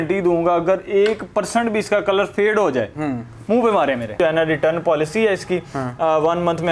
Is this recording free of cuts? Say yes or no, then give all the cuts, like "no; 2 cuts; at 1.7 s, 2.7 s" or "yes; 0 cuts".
no; 1 cut; at 4.2 s